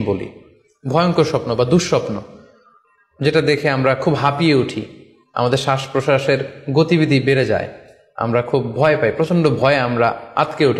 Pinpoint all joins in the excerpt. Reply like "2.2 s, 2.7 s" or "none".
none